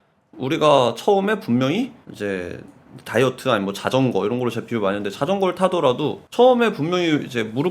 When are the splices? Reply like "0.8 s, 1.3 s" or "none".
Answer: 2.0 s, 6.2 s